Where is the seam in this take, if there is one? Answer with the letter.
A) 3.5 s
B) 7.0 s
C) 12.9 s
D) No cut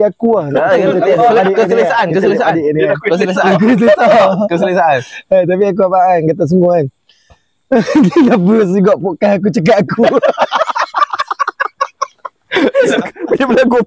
C